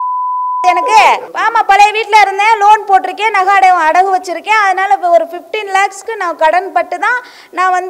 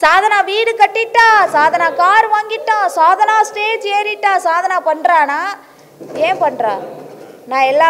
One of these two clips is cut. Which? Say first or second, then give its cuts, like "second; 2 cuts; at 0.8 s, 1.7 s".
first; 1 cut; at 1.3 s